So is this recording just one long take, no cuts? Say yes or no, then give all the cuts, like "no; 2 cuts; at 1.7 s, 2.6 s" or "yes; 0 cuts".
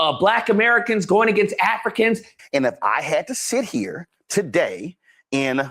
no; 1 cut; at 2.3 s